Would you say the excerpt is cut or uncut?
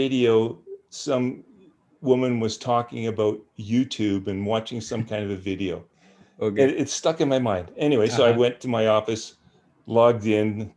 uncut